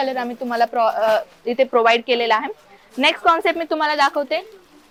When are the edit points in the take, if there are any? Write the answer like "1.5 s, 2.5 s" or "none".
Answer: none